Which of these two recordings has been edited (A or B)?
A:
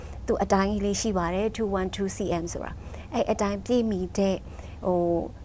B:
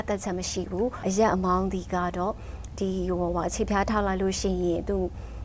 B